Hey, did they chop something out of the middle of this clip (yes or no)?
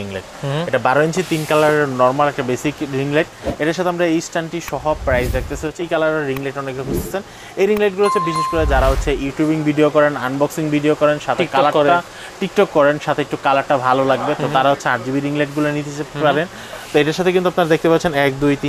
yes